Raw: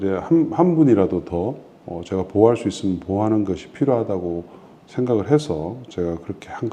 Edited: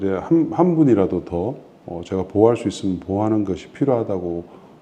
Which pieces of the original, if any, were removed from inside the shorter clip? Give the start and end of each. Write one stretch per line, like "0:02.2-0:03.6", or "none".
none